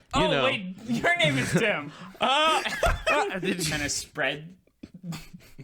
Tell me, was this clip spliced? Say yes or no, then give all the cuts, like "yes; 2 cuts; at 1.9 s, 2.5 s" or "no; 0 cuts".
yes; 1 cut; at 3.7 s